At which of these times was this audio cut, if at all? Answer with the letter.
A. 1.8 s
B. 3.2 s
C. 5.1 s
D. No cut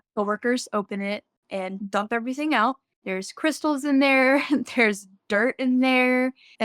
A